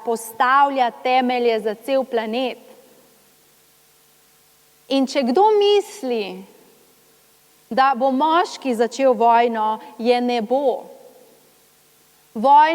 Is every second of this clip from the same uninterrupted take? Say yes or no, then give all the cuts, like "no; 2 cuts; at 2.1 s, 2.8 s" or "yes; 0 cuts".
yes; 0 cuts